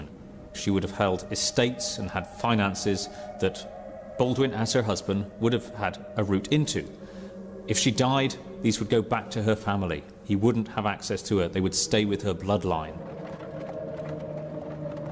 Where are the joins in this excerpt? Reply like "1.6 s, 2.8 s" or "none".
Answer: 13.3 s